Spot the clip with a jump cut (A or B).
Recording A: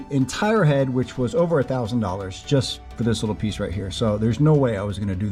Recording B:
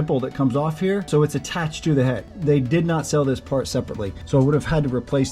B